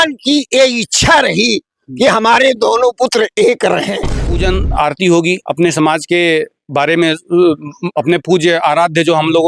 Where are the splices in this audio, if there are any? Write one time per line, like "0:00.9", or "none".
0:04.4